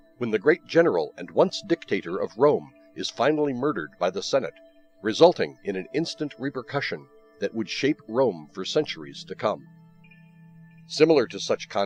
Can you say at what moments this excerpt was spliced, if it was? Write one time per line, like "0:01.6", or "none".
none